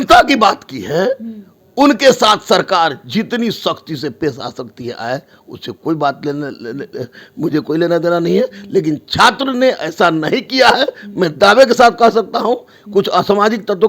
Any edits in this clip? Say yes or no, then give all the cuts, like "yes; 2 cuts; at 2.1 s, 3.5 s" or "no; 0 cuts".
no; 0 cuts